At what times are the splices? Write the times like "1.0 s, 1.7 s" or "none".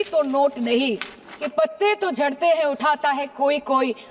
1.5 s